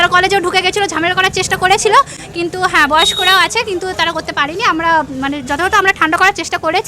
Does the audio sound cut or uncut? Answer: uncut